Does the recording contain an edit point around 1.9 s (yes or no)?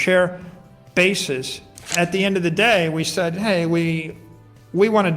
yes